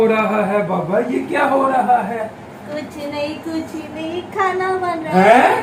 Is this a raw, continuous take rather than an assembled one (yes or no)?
yes